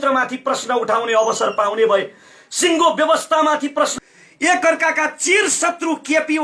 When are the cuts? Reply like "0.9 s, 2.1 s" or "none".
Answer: 3.9 s